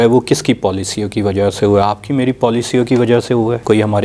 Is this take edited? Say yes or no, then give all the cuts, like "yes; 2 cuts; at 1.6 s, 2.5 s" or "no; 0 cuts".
no; 0 cuts